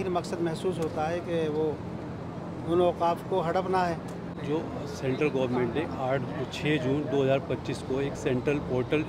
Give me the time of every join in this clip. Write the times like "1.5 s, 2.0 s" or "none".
4.4 s